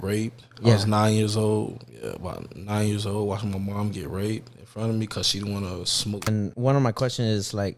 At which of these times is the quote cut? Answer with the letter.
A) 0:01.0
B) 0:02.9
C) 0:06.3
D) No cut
C